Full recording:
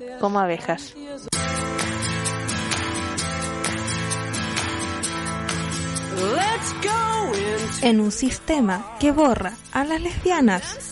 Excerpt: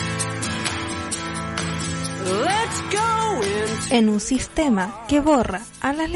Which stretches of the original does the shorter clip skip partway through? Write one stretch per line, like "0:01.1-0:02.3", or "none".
0:03.1-0:05.0